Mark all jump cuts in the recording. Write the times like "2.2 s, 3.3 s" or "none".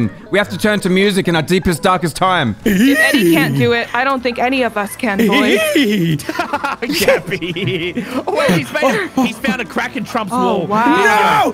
2.6 s